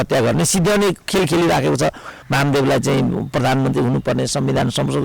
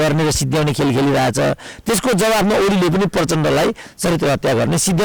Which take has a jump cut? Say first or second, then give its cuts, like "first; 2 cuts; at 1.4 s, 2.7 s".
first; 1 cut; at 2.1 s